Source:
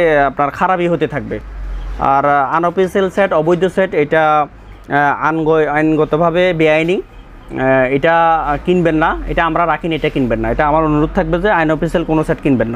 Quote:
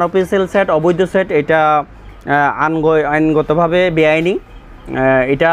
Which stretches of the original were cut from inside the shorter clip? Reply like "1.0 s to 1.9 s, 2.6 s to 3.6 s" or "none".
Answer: none

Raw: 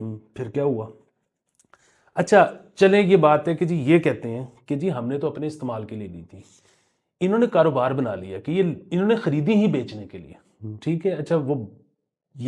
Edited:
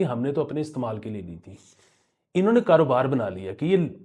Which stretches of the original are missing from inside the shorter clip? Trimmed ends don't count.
none

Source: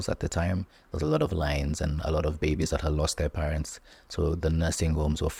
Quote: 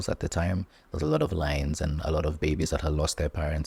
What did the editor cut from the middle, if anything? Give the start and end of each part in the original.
none

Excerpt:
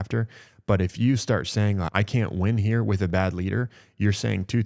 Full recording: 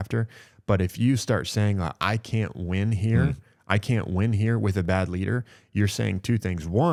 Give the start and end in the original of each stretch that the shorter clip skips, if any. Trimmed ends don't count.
1.9 s to 3.6 s

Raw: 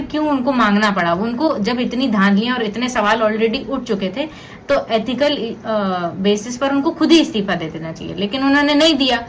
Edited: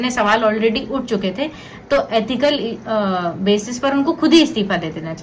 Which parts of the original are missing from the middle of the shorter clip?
none

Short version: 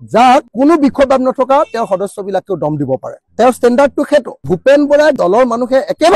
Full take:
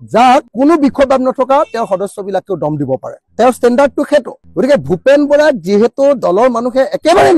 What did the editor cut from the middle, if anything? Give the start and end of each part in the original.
4.5 s to 4.9 s, 5.6 s to 6.2 s

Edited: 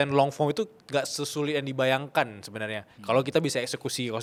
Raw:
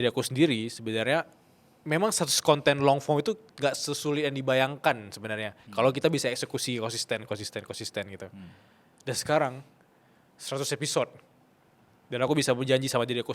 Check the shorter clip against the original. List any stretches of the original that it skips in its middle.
none

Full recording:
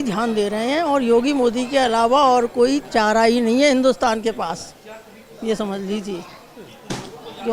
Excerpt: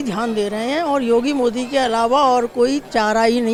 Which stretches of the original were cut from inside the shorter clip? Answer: none

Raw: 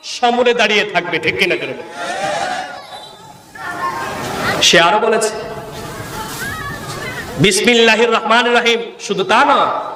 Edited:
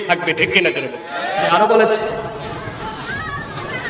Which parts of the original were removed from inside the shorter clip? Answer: 2.4 s to 4.8 s

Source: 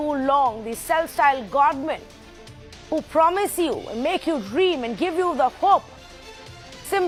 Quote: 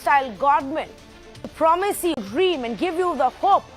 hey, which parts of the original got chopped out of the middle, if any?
2.6 s to 3.1 s, 3.8 s to 4.4 s

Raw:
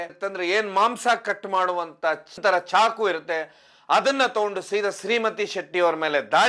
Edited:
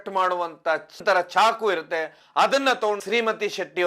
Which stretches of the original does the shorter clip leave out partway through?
3.5 s to 3.7 s, 4.6 s to 5.0 s

